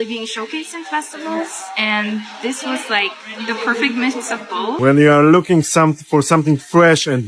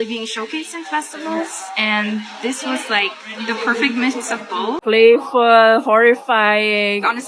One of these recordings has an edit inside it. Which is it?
first; 1 cut; at 4.8 s

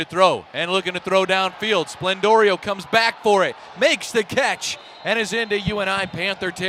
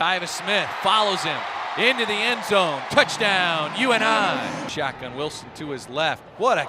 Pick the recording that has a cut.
second; 1 cut; at 4.7 s

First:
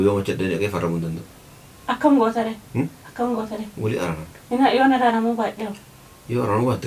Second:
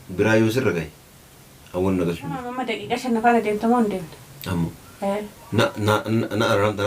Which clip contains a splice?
second; 1 cut; at 2.7 s

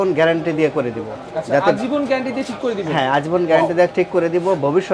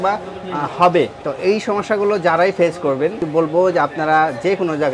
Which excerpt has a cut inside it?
second; 2 cuts; at 1.2 s, 3.3 s

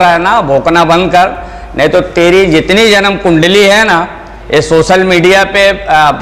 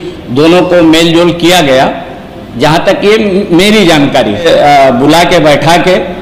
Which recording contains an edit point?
second; 1 cut; at 4.4 s

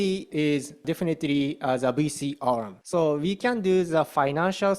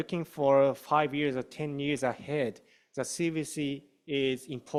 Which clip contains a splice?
first; 2 cuts; at 0.8 s, 2.8 s

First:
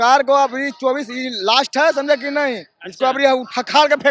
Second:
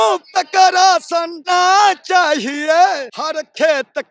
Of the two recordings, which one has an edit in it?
second; 2 cuts; at 1.4 s, 3.2 s

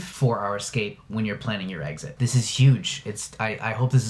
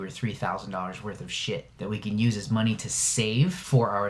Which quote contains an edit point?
second; 1 cut; at 1.7 s

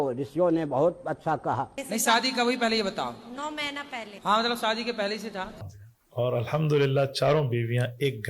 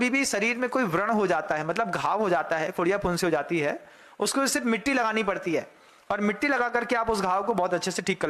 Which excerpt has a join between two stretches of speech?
first; 2 cuts; at 1.8 s, 5.6 s

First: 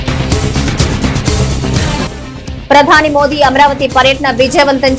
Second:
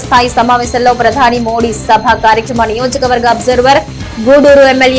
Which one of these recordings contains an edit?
first; 1 cut; at 1.8 s

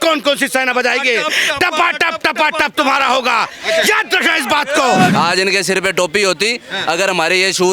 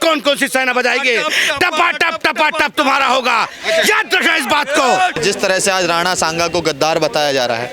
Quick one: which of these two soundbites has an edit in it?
first; 1 cut; at 5.1 s

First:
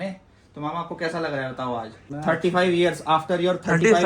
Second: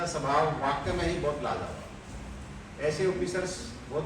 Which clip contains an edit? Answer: first; 1 cut; at 2.1 s

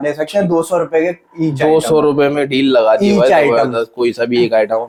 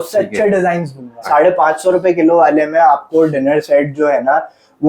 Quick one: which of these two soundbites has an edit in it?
second; 1 cut; at 1.2 s

